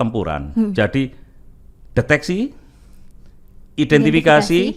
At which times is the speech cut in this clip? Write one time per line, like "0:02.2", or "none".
none